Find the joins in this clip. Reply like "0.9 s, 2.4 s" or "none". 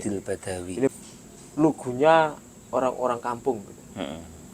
0.9 s